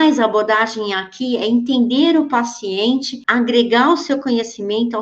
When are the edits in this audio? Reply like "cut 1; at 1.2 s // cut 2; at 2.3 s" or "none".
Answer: cut 1; at 3.2 s